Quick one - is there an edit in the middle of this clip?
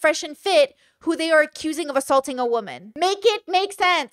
yes; 1 cut; at 2.8 s

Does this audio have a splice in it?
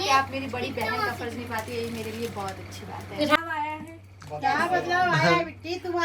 yes; 1 cut; at 3.4 s

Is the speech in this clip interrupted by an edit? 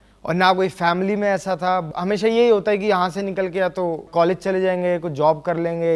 yes; 1 cut; at 1.8 s

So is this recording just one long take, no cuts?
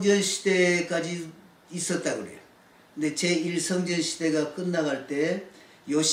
yes; 0 cuts

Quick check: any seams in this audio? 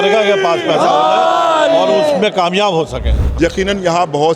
yes; 1 cut; at 3.2 s

